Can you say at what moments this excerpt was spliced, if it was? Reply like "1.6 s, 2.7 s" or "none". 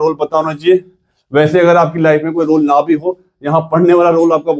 none